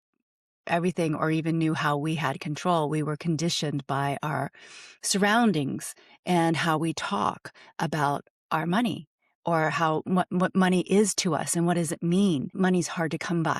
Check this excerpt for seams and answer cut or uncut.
cut